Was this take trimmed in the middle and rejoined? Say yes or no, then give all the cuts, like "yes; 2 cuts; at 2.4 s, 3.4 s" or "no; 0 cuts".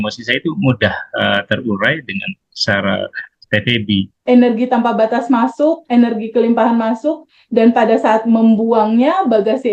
yes; 1 cut; at 4.2 s